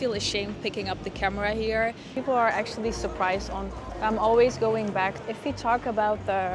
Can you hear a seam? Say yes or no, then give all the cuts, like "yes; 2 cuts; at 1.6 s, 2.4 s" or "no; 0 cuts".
yes; 2 cuts; at 2.1 s, 5.2 s